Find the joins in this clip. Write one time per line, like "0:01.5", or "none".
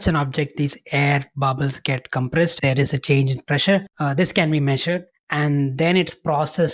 0:02.5
0:03.9
0:05.1